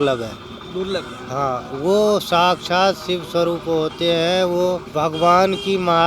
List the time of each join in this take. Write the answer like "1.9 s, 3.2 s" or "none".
4.9 s